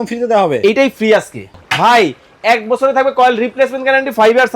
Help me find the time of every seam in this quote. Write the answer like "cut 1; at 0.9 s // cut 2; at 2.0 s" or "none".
cut 1; at 1.6 s

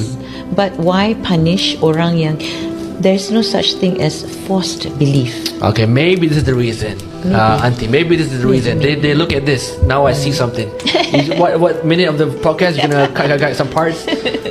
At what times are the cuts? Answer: none

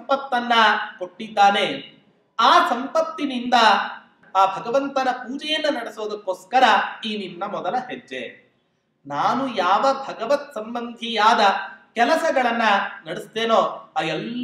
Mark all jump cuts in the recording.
cut 1; at 4.2 s

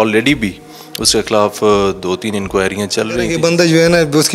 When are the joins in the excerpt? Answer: cut 1; at 3.3 s

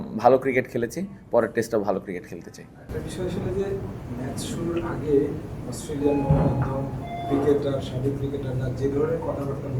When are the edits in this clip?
none

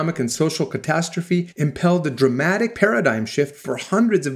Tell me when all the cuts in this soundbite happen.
cut 1; at 1.5 s // cut 2; at 2.7 s

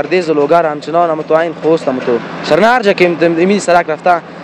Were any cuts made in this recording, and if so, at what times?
none

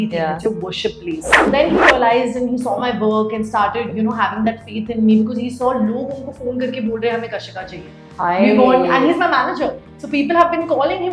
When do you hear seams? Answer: cut 1; at 1.5 s

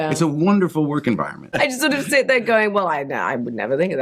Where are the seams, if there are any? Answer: cut 1; at 1.6 s

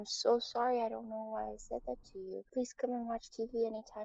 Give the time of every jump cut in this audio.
cut 1; at 2.5 s

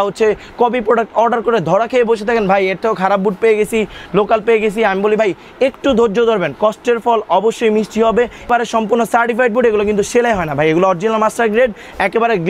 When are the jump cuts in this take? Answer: cut 1; at 8.5 s

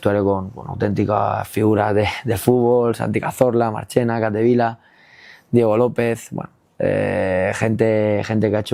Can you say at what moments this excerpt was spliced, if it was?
none

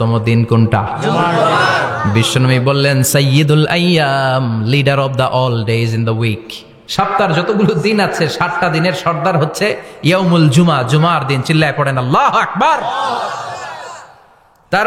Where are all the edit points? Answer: none

